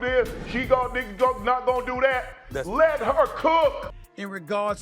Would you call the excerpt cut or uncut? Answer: cut